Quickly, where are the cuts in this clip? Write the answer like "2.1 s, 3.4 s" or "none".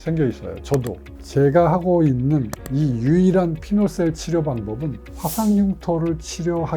1.1 s